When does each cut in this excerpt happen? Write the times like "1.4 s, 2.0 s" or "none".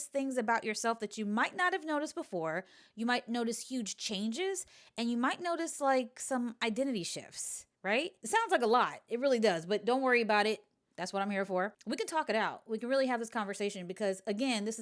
8.2 s, 11.8 s